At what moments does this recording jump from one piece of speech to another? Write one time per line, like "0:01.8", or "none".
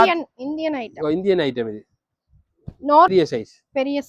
0:03.1